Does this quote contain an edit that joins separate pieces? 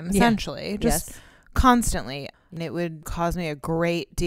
yes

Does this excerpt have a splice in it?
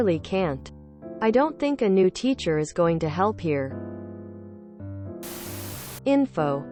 no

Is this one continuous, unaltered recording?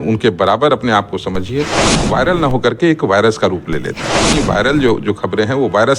no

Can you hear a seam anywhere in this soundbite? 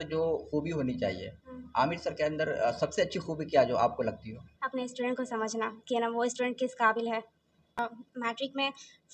yes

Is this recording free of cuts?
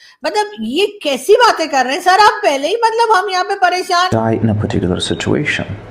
no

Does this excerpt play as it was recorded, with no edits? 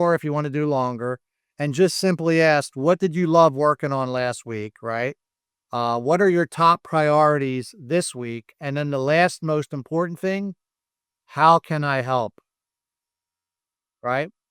yes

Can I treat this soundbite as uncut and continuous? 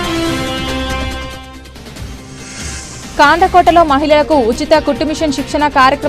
yes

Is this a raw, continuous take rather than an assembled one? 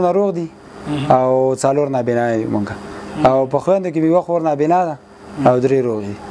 yes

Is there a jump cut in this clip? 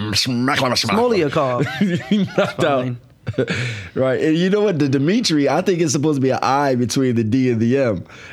no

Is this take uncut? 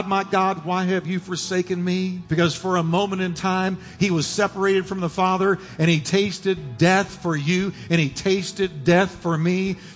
no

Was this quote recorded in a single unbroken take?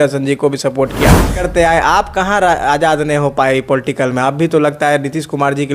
no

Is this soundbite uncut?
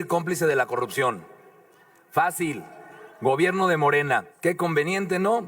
no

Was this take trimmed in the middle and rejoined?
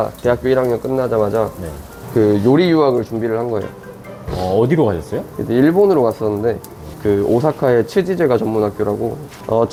no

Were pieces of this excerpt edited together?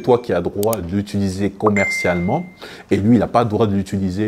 no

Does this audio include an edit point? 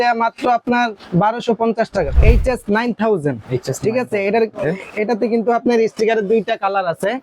yes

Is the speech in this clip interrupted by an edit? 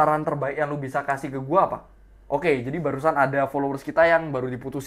no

